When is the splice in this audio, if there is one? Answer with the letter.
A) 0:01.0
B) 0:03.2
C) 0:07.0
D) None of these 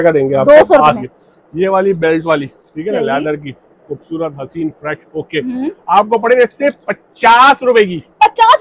A